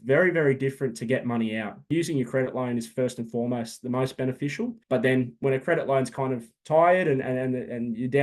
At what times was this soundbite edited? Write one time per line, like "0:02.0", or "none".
0:01.9
0:04.8